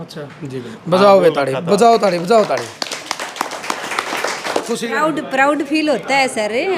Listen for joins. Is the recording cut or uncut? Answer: cut